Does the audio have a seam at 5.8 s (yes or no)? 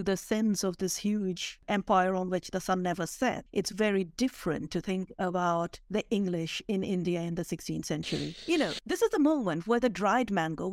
no